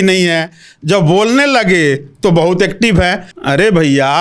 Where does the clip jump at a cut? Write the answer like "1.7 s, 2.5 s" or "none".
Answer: 3.3 s